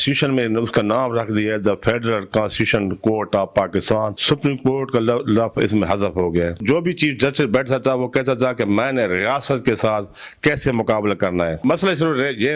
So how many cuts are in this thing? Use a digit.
3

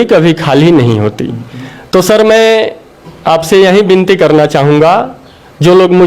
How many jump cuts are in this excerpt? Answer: 0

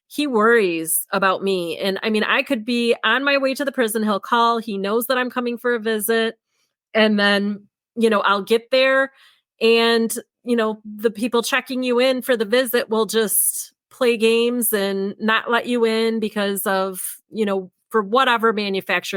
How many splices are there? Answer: 0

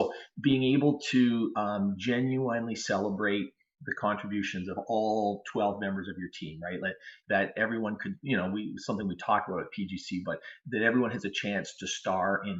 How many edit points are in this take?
0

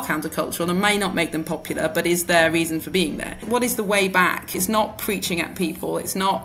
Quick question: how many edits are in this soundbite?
2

